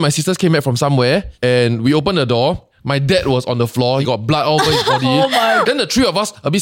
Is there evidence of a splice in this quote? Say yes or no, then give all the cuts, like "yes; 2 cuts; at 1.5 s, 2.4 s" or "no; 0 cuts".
yes; 3 cuts; at 2.7 s, 4.0 s, 5.6 s